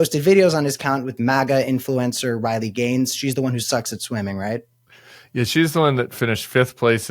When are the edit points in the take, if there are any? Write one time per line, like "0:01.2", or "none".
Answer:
0:01.1